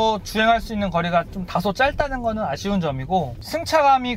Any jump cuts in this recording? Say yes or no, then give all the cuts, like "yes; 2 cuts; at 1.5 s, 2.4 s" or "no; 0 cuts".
no; 0 cuts